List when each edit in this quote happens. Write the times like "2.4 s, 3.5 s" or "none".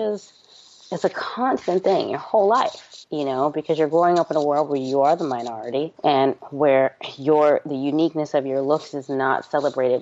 none